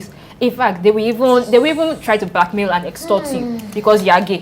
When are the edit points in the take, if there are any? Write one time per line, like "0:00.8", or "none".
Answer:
none

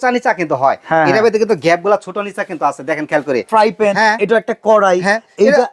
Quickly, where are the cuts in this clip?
0:03.5

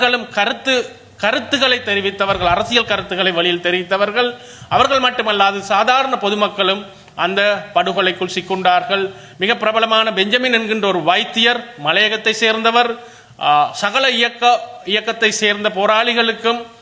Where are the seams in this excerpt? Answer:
none

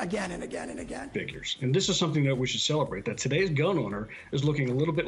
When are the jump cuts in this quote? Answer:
0:01.0

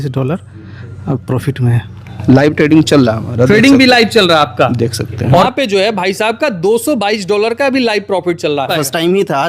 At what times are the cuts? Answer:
0:02.1
0:05.5
0:08.7

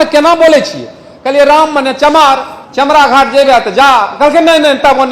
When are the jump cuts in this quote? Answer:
0:02.6

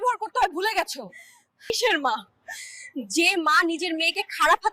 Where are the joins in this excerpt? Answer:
0:01.7

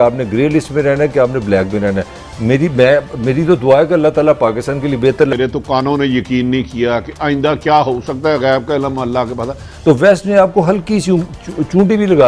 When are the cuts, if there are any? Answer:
0:05.3
0:09.7

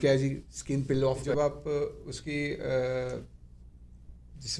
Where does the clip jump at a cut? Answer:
0:01.2

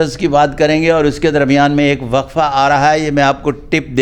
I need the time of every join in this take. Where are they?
none

